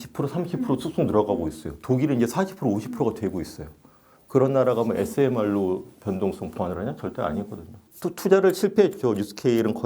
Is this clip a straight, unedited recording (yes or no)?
no